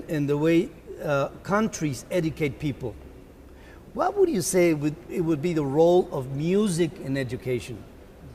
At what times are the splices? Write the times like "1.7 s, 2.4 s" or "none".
none

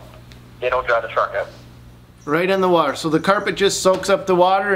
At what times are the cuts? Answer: 1.9 s

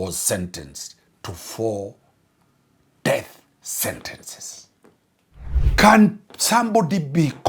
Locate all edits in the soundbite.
5.5 s

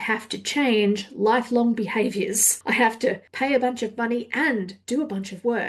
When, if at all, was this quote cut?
2.5 s, 3.3 s, 4.8 s

